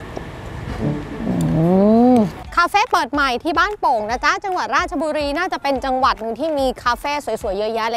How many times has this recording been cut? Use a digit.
1